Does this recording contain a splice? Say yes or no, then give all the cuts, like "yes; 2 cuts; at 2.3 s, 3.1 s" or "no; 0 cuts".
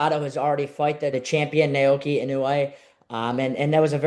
yes; 1 cut; at 1.1 s